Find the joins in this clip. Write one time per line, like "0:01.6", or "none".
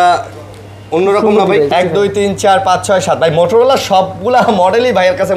0:01.7